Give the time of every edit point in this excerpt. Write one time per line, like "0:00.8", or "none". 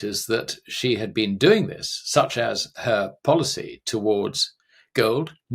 none